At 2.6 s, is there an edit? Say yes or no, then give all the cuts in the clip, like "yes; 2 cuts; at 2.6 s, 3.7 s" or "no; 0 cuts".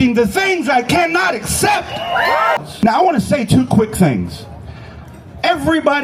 yes; 1 cut; at 2.6 s